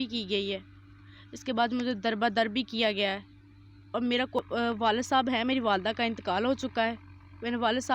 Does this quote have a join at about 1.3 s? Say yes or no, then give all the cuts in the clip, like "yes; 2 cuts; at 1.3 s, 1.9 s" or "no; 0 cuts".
no; 1 cut; at 4.4 s